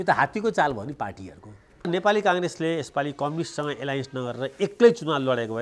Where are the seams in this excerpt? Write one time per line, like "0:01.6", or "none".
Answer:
0:01.9